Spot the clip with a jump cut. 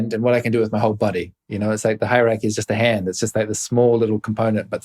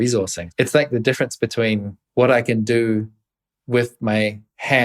second; 1 cut; at 2.0 s

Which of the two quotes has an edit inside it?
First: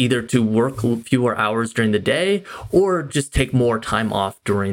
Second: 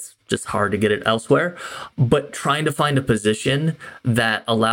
second; 1 cut; at 1.9 s

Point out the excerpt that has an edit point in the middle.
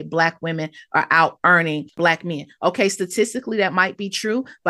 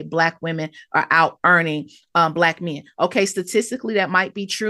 first; 1 cut; at 2.0 s

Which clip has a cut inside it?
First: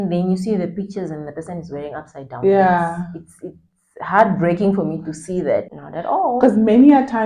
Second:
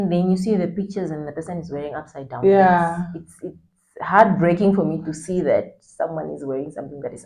first; 1 cut; at 5.8 s

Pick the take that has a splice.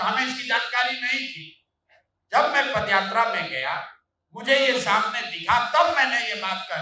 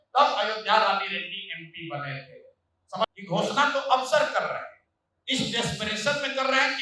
second; 1 cut; at 3.0 s

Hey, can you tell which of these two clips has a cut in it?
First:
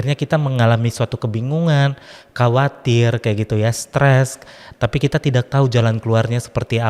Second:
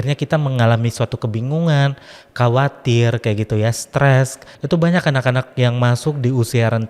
second; 1 cut; at 4.5 s

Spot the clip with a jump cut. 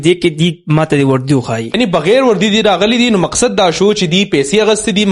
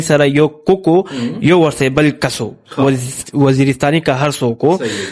first; 1 cut; at 1.8 s

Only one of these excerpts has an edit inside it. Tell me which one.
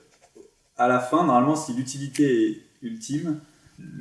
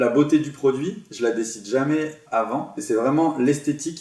second; 2 cuts; at 1.0 s, 2.7 s

